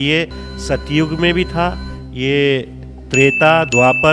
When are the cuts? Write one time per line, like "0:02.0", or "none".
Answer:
none